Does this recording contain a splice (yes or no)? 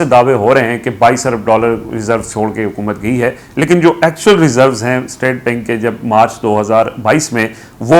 no